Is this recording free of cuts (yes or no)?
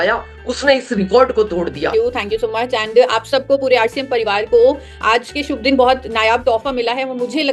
no